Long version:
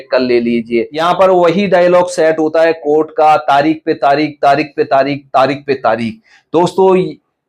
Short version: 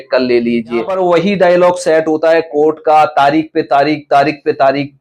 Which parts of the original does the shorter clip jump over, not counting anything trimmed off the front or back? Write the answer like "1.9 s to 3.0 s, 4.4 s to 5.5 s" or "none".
0.9 s to 1.2 s